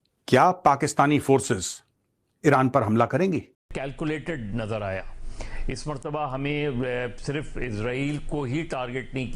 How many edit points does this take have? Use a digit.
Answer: 1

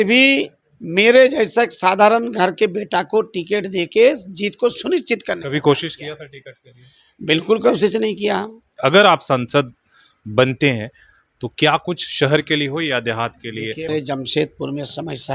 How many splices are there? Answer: 2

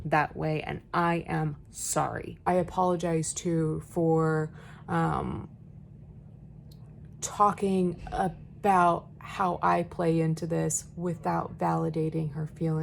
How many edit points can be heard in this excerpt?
1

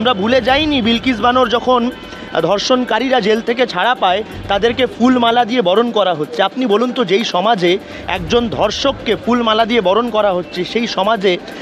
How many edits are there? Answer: 0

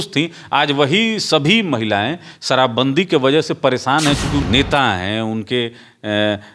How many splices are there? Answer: 1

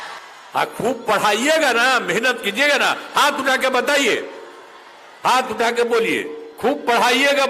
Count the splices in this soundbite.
0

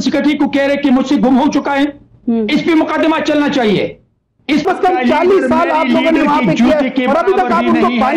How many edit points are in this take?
1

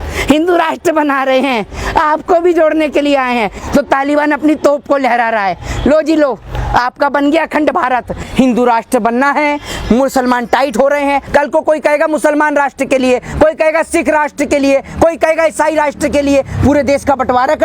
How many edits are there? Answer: 3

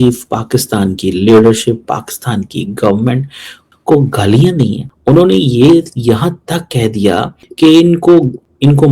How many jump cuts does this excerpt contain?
1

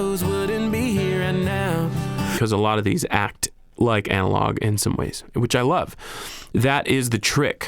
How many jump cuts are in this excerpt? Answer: 1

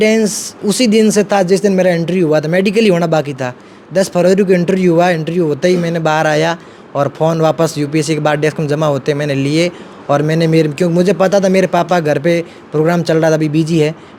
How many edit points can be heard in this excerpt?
0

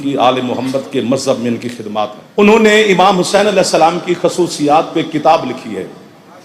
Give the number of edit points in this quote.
1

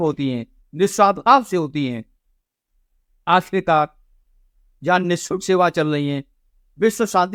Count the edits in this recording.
0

